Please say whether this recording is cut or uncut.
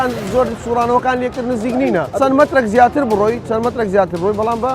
cut